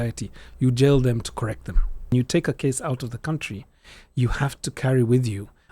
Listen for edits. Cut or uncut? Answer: cut